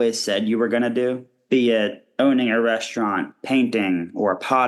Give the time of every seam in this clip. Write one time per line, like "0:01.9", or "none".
0:01.3
0:02.0
0:03.4